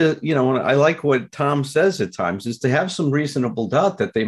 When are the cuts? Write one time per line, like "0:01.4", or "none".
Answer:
none